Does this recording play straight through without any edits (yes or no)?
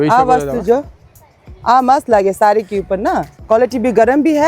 no